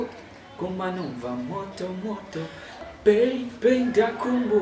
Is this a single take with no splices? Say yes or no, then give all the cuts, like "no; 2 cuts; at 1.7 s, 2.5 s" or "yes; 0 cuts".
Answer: no; 1 cut; at 2.8 s